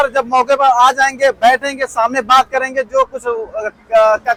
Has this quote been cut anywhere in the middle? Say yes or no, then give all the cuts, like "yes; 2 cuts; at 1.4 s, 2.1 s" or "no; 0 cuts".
no; 0 cuts